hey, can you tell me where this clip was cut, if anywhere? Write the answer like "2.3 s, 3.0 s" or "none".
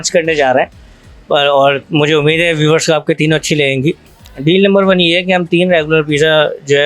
4.3 s